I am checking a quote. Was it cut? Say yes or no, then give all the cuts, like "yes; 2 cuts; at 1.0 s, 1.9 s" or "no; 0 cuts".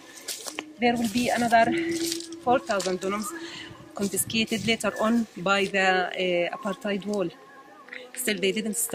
no; 0 cuts